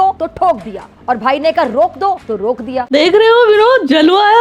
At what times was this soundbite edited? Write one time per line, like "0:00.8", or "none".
0:02.9